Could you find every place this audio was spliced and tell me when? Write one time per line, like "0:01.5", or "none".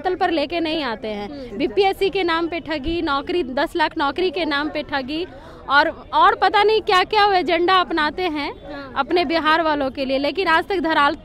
none